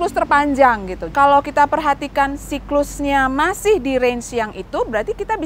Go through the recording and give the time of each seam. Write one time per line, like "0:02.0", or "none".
0:01.0